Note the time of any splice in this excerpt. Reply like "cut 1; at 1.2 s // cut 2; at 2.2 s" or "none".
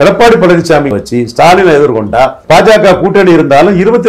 cut 1; at 0.9 s